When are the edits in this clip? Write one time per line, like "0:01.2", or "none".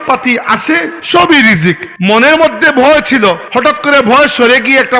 0:00.9
0:01.9
0:03.5